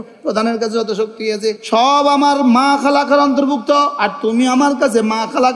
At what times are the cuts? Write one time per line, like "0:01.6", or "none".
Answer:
0:04.0